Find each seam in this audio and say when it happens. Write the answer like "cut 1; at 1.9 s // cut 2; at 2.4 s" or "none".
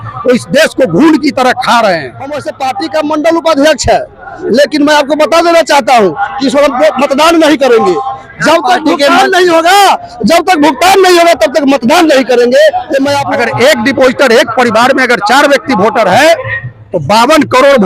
cut 1; at 2.5 s // cut 2; at 13.2 s